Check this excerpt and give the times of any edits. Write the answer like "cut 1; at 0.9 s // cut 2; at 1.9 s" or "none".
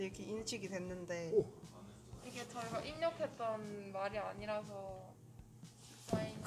none